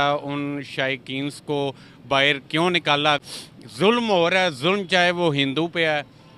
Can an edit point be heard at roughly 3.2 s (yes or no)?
yes